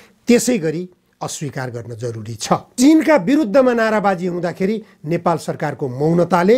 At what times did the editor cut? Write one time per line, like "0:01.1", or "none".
0:02.7